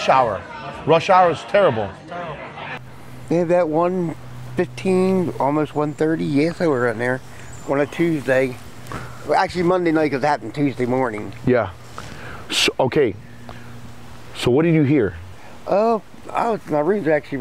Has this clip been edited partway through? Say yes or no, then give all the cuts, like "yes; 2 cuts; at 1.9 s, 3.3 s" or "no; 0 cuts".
yes; 1 cut; at 2.9 s